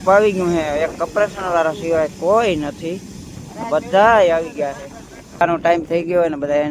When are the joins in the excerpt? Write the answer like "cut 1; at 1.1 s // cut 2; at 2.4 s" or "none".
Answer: cut 1; at 5.4 s